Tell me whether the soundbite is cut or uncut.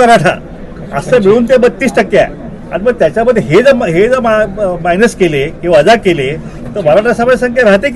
uncut